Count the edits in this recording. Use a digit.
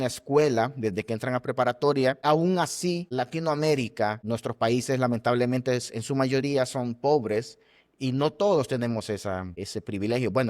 4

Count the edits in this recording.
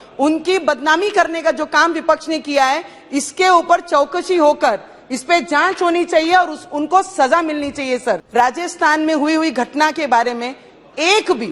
1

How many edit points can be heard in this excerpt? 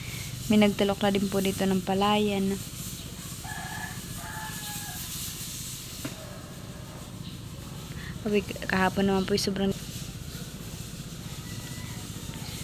1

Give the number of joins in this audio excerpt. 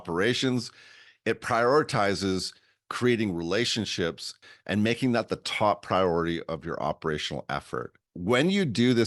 2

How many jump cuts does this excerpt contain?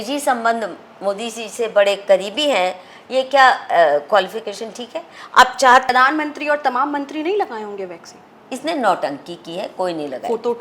1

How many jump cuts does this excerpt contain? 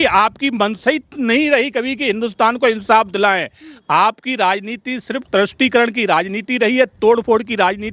0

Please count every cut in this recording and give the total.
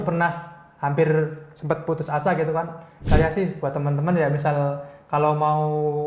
1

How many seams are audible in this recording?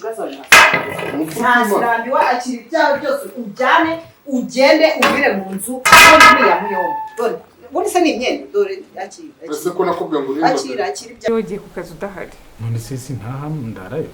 1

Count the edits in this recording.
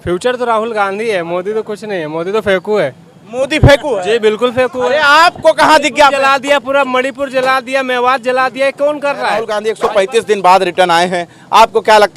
1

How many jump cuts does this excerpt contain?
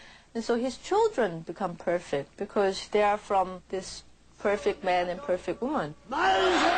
0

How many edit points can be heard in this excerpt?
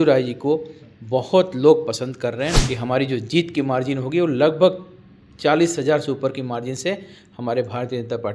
1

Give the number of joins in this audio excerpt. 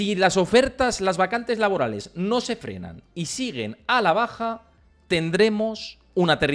0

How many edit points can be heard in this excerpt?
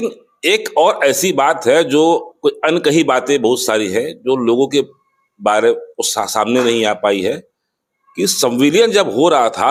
0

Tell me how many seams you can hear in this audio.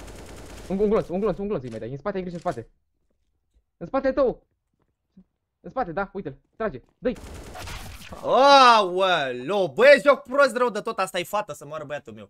0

